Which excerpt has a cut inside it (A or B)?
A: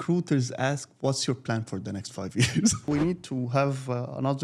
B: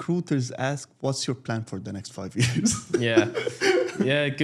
A